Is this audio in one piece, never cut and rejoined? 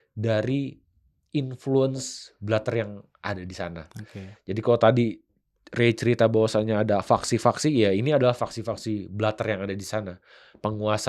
yes; 0 cuts

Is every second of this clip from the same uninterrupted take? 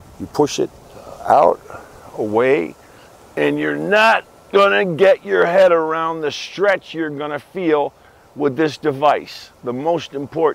yes; 0 cuts

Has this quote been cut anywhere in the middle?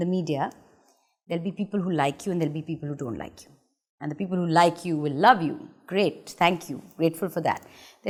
no; 0 cuts

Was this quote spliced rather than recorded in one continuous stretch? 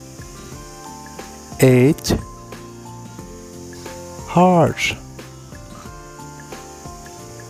no; 0 cuts

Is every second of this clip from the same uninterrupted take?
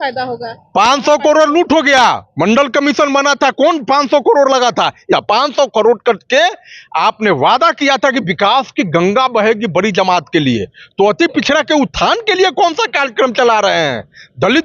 no; 1 cut; at 5.1 s

